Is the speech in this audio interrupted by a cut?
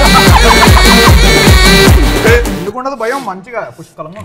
no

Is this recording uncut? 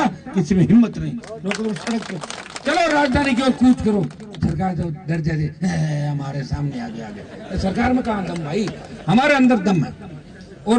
yes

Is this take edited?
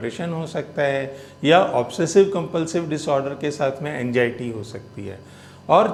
no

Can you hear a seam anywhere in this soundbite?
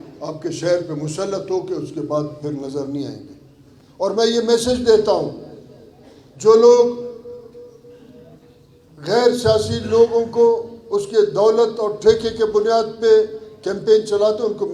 no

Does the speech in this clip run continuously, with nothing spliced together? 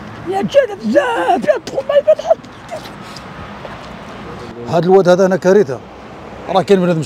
no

